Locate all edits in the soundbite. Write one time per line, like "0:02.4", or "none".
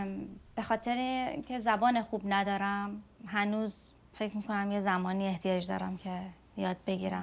none